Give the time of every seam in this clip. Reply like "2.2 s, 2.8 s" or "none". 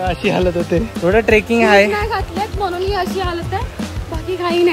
0.9 s